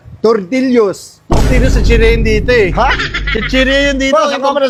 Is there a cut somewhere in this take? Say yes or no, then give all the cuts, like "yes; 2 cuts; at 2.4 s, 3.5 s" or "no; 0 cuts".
no; 0 cuts